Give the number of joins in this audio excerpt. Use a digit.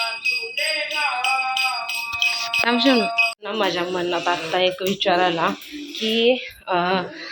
1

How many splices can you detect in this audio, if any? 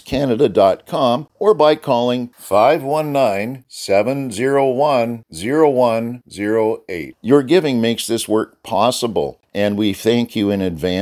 2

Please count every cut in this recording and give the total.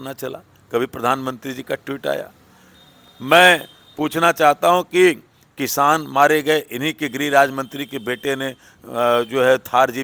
0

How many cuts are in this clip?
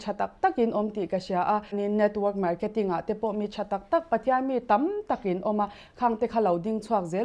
1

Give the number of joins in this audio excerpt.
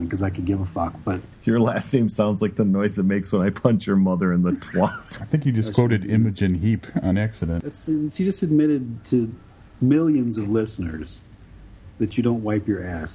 3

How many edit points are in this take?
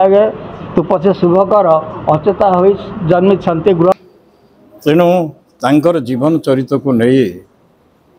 1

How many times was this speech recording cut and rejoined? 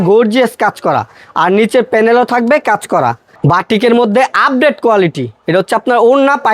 1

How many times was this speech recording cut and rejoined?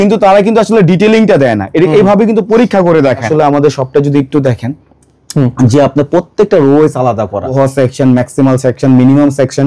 2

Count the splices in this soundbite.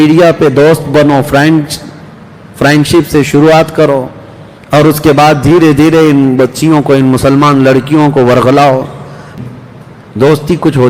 1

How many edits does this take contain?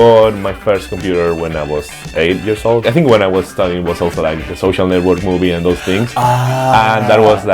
1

